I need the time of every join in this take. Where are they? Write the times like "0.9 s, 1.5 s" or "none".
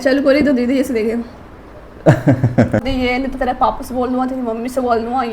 2.9 s